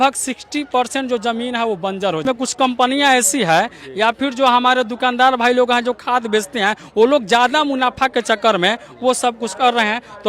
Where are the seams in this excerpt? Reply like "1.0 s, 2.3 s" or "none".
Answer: 2.2 s